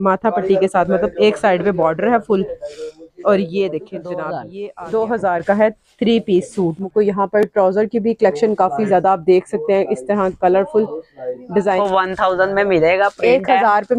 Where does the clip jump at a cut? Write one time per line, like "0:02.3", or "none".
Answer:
0:04.5
0:06.9
0:11.8